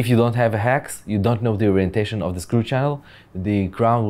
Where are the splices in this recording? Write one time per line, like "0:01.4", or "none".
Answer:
none